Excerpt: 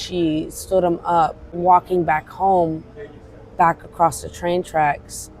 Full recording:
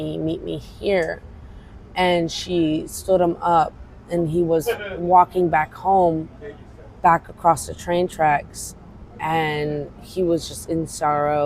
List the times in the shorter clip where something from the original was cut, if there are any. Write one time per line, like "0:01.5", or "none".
0:01.5